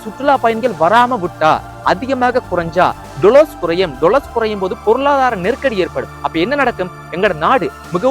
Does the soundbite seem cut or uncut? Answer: uncut